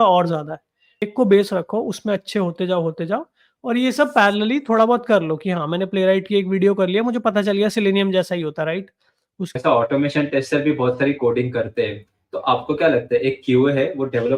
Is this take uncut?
no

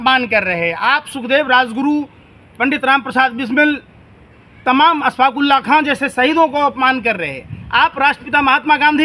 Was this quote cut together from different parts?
no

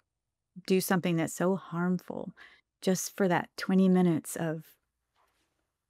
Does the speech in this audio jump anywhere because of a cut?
no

